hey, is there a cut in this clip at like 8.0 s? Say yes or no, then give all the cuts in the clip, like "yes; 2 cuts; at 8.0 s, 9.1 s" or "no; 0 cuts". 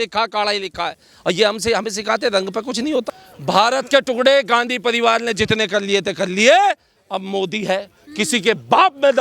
no; 1 cut; at 3.2 s